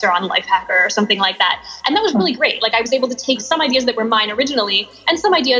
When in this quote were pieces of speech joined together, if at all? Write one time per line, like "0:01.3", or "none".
0:03.4